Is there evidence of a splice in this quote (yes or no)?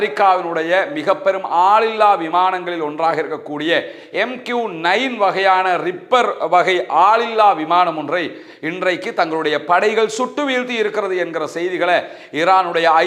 no